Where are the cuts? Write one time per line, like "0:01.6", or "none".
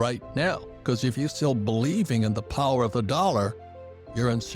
0:01.3